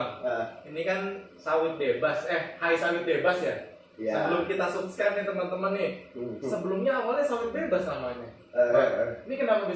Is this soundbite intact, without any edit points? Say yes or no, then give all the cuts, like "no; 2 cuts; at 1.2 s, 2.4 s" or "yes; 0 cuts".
yes; 0 cuts